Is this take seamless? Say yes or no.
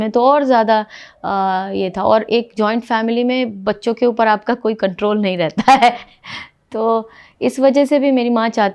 yes